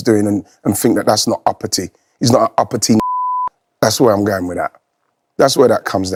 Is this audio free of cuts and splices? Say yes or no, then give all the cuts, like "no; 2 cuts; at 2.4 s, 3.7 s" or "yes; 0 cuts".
yes; 0 cuts